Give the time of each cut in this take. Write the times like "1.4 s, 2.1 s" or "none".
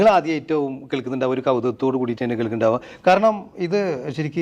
none